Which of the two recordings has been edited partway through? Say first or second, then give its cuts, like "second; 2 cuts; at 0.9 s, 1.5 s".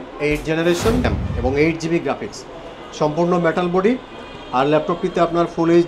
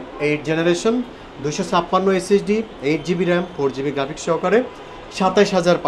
first; 1 cut; at 1.1 s